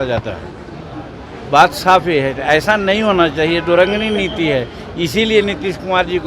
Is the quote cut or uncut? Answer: uncut